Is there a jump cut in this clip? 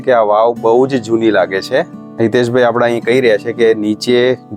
yes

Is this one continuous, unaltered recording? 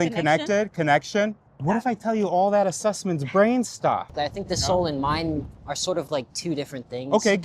no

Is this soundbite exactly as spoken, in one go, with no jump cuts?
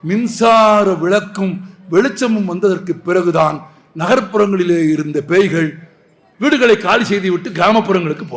no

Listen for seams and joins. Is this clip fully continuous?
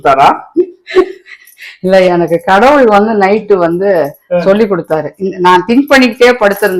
yes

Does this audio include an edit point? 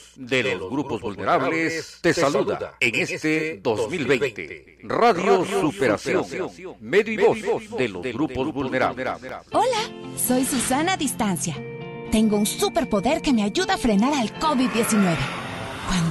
yes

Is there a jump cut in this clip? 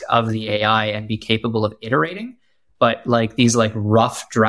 no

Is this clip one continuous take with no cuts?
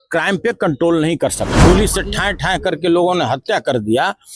no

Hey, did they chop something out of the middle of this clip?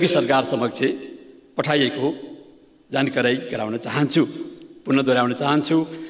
no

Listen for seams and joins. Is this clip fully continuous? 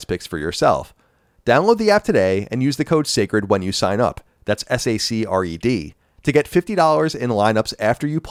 yes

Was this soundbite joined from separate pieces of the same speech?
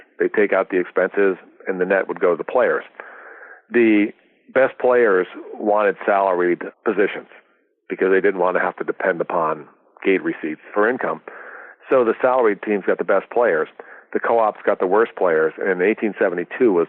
yes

